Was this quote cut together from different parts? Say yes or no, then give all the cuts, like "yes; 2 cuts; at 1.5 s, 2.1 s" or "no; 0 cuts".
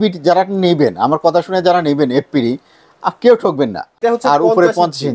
yes; 1 cut; at 3.8 s